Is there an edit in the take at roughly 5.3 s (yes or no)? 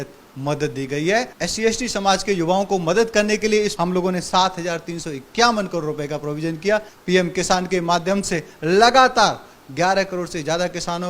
no